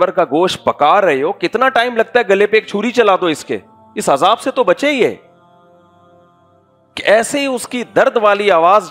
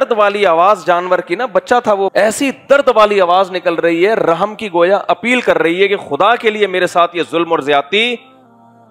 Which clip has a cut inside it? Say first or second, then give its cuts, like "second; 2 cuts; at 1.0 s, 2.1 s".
second; 1 cut; at 2.1 s